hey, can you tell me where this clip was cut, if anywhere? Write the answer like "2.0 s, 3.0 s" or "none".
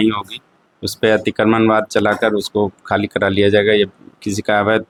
none